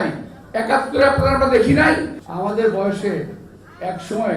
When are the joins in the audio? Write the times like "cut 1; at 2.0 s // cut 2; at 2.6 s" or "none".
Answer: cut 1; at 2.2 s